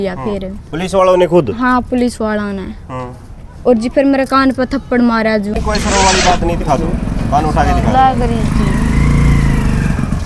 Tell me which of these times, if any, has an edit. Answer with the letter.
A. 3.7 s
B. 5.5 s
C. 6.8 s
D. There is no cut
B